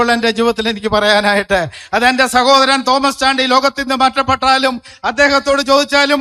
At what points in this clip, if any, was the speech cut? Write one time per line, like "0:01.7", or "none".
none